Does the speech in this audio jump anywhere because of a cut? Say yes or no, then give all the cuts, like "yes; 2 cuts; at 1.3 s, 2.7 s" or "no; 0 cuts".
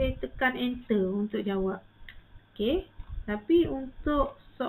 no; 0 cuts